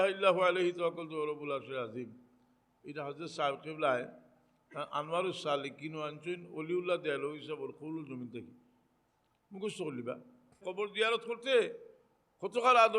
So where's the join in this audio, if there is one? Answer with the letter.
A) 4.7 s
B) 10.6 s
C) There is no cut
B